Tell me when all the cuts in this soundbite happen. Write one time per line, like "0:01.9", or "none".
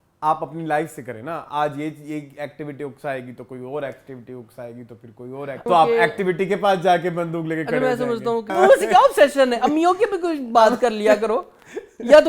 0:05.7
0:08.5